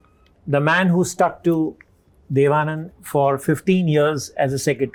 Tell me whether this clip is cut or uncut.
uncut